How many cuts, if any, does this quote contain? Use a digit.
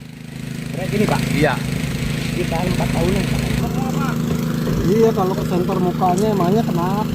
1